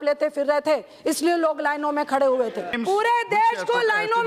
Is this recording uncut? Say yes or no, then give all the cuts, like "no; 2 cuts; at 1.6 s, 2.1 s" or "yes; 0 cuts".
no; 1 cut; at 2.7 s